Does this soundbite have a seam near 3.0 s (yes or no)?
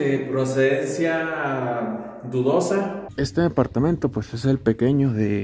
yes